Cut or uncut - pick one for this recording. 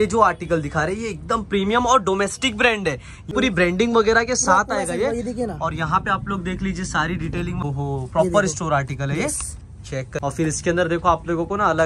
cut